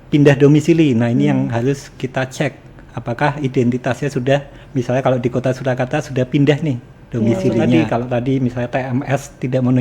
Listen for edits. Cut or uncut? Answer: cut